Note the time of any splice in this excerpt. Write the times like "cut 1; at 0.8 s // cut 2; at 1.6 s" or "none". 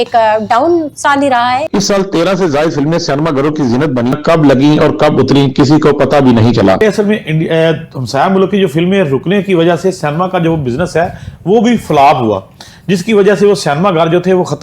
cut 1; at 1.7 s // cut 2; at 4.2 s // cut 3; at 6.8 s